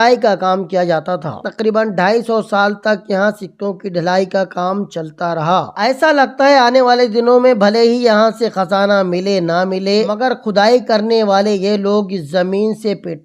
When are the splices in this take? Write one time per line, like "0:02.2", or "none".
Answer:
0:01.4
0:05.8
0:10.1

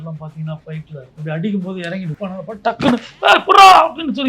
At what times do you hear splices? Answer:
0:01.0
0:02.2

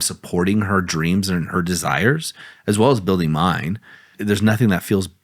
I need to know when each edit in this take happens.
0:04.1

